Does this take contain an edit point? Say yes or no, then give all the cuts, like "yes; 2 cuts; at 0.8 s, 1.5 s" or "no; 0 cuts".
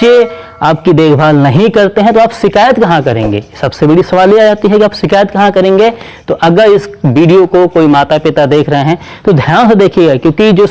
no; 0 cuts